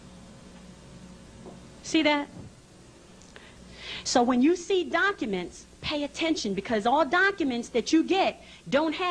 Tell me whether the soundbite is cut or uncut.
uncut